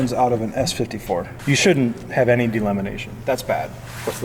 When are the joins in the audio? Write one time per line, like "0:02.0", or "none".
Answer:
0:01.3